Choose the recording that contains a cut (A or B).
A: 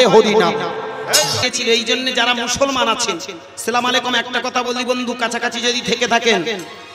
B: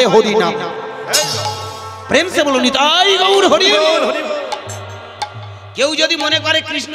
A